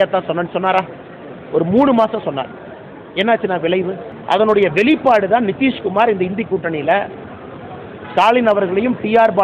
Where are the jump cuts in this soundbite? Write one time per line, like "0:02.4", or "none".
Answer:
0:04.1